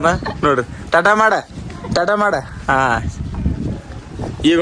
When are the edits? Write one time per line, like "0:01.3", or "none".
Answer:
none